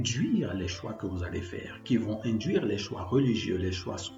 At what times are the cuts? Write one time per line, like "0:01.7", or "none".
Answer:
none